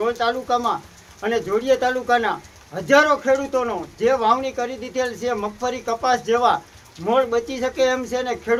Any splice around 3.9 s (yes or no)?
no